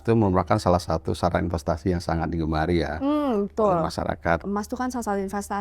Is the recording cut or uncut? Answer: cut